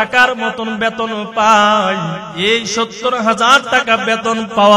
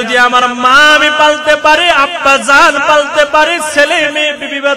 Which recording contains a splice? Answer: first; 1 cut; at 2.2 s

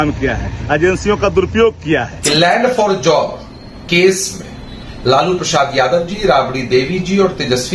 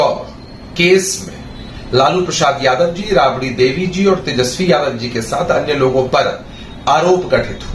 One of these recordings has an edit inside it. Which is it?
first; 1 cut; at 2.2 s

